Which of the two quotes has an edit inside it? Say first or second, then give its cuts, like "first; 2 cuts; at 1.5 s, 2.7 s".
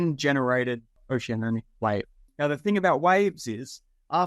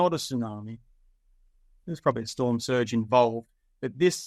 first; 2 cuts; at 0.9 s, 2.2 s